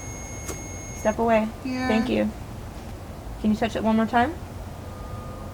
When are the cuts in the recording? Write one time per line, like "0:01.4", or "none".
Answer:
none